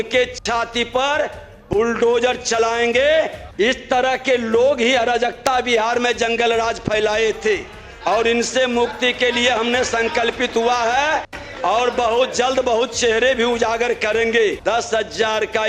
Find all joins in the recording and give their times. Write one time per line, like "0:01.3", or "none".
0:03.4
0:14.6